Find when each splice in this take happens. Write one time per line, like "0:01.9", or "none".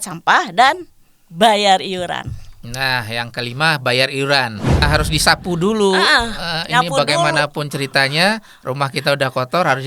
0:04.9